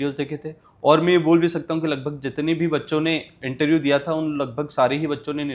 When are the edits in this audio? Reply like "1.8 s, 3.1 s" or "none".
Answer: none